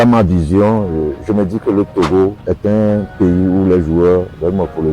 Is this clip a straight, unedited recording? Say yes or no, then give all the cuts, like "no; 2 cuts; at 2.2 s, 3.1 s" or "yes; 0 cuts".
yes; 0 cuts